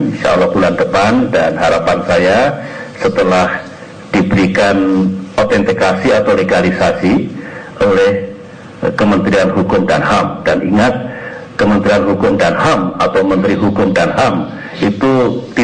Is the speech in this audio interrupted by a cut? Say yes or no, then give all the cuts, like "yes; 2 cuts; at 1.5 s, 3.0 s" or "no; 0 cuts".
yes; 1 cut; at 10.6 s